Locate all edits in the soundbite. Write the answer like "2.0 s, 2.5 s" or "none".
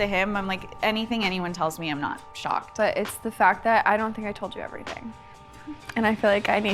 2.7 s